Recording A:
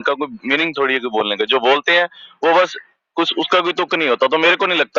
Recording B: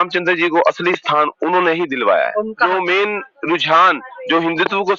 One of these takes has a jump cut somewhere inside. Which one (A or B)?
B